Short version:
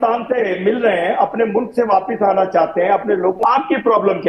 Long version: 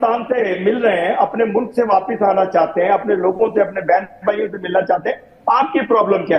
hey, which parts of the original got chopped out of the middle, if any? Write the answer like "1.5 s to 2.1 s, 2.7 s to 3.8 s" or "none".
3.4 s to 5.4 s